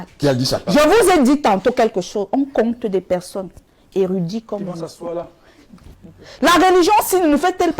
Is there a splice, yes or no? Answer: yes